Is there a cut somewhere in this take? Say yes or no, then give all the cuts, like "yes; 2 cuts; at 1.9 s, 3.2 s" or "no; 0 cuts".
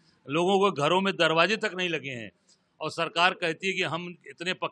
no; 0 cuts